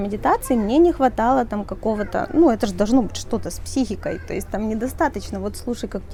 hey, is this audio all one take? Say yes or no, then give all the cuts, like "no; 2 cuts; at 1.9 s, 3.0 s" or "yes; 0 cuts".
yes; 0 cuts